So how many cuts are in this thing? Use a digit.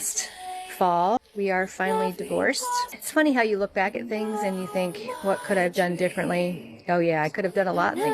2